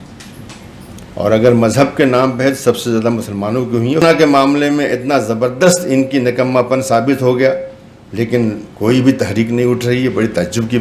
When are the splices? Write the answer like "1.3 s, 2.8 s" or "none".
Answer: 4.0 s